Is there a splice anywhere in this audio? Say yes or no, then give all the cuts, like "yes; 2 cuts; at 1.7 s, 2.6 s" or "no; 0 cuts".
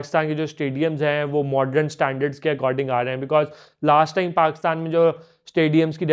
no; 0 cuts